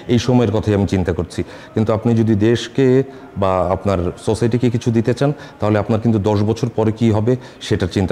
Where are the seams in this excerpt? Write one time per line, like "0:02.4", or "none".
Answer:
none